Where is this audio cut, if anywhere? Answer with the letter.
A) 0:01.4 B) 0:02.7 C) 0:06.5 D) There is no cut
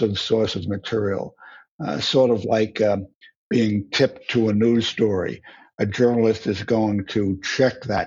D